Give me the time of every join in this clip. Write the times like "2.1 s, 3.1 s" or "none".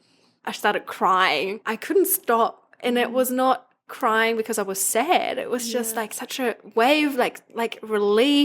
1.6 s